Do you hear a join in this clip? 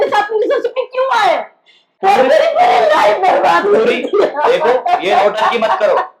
yes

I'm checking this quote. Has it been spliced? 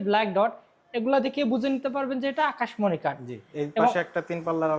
no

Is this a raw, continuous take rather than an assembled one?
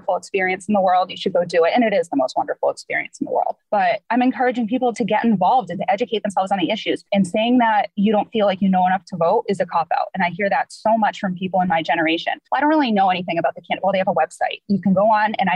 no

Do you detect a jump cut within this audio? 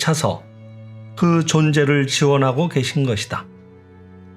yes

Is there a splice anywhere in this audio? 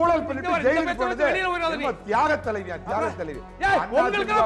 no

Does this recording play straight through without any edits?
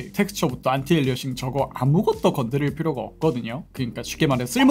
yes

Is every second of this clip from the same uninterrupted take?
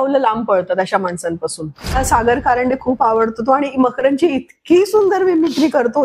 no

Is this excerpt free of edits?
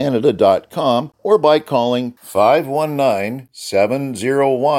no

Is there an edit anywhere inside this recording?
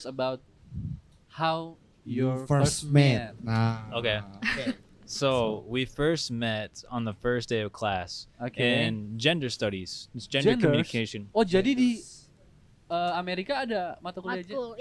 no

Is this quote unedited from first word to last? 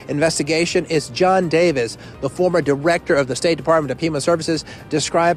yes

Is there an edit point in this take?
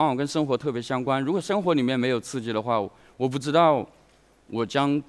no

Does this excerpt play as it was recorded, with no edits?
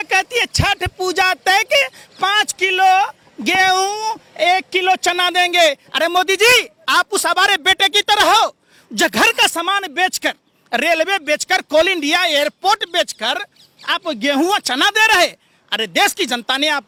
yes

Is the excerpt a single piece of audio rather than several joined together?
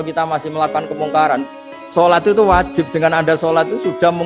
no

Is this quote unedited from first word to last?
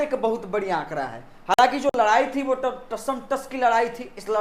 yes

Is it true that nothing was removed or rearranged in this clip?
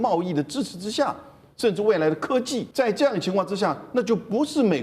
no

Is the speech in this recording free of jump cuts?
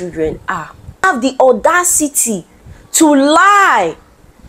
no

